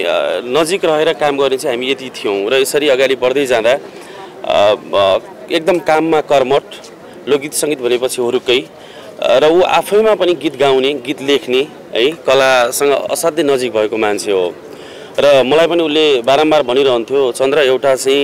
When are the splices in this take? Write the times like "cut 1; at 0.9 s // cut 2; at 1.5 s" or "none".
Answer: none